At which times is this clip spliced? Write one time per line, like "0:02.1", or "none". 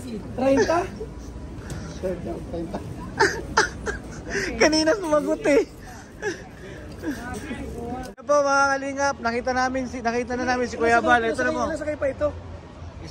0:08.1